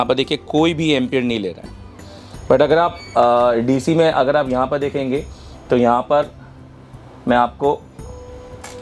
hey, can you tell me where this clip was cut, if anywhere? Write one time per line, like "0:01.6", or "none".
none